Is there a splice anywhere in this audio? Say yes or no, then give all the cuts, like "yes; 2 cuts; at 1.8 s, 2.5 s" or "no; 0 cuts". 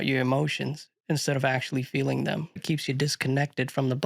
yes; 1 cut; at 2.6 s